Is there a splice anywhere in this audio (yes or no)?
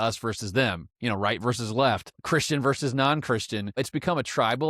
yes